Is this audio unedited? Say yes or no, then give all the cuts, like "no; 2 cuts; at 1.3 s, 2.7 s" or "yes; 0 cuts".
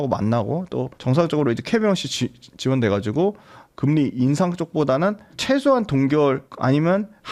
yes; 0 cuts